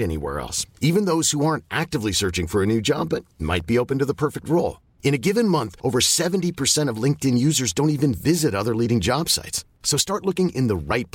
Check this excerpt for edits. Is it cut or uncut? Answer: uncut